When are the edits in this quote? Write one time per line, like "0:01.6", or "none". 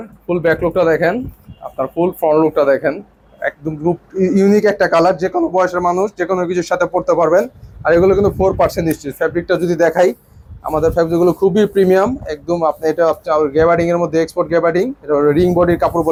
none